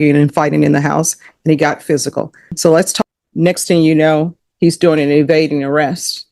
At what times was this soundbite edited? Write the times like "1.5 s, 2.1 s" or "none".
2.9 s